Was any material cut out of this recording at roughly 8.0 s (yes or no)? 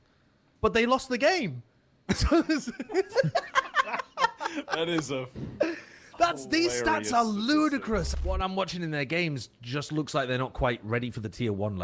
yes